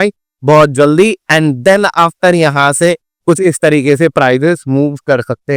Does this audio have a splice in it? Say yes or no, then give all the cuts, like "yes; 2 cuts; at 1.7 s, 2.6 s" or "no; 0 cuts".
no; 0 cuts